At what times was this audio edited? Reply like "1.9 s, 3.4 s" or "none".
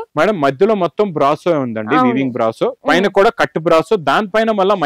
none